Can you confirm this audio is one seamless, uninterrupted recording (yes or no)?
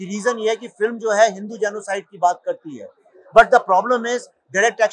yes